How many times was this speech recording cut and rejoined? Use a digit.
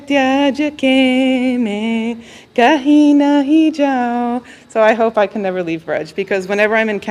0